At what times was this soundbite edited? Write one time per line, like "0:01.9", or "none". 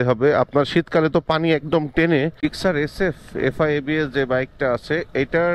0:02.4